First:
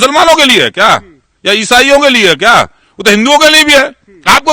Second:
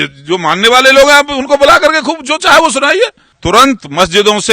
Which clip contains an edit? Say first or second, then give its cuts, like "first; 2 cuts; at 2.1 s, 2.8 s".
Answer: second; 1 cut; at 3.3 s